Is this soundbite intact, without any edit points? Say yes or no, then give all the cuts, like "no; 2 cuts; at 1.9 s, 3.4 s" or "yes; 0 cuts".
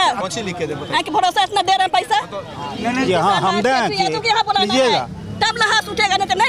yes; 0 cuts